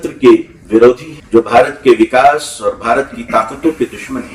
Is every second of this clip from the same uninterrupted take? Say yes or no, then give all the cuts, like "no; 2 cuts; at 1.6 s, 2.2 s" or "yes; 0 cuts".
no; 1 cut; at 1.1 s